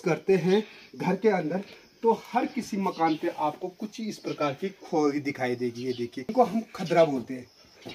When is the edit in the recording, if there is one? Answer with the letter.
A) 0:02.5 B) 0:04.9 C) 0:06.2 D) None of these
C